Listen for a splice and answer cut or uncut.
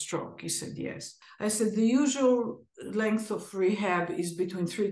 cut